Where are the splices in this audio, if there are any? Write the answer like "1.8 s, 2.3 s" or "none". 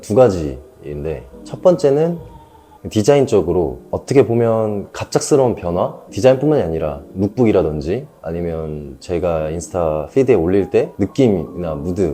none